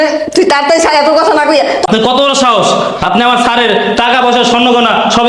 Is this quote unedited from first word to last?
no; 1 cut; at 1.8 s

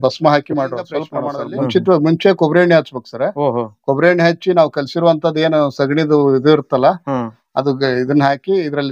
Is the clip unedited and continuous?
no; 1 cut; at 1.0 s

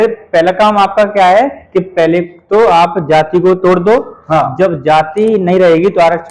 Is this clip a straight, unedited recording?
yes; 0 cuts

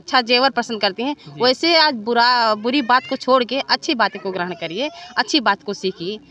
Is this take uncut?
yes; 0 cuts

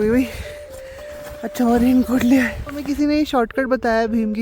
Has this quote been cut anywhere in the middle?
yes; 1 cut; at 2.8 s

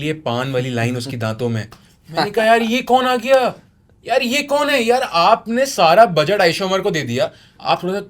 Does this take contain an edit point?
no; 0 cuts

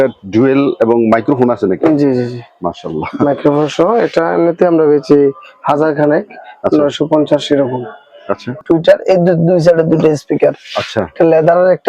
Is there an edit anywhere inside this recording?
yes; 1 cut; at 8.6 s

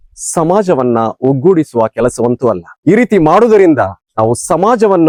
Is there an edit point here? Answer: no; 0 cuts

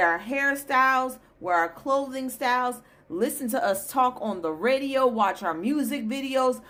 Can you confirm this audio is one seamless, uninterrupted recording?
yes; 0 cuts

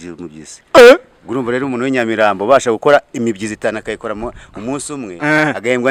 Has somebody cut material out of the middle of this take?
no; 0 cuts

